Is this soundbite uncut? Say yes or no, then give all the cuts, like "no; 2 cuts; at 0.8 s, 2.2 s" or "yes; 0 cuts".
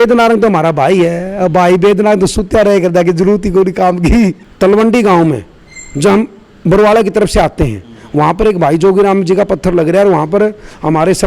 no; 1 cut; at 4.5 s